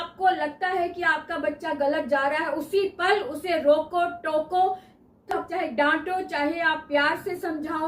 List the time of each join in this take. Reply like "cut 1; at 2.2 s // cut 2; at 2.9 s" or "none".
cut 1; at 5.4 s